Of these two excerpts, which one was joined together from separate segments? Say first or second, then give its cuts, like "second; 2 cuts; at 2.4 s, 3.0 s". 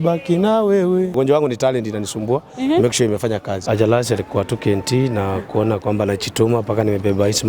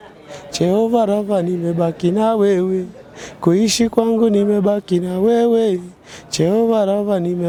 first; 2 cuts; at 1.1 s, 3.5 s